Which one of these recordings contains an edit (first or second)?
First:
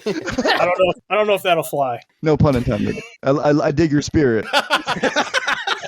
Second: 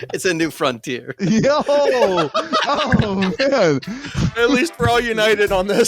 first